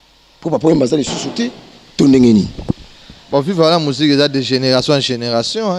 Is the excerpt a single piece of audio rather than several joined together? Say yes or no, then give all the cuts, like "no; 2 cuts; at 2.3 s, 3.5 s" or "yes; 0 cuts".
yes; 0 cuts